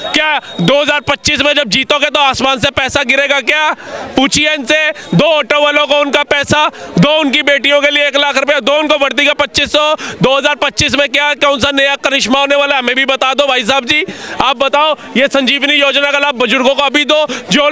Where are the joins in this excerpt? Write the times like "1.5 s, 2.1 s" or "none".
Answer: none